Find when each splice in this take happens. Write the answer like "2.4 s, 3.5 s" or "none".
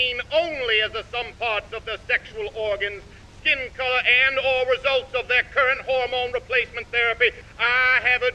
none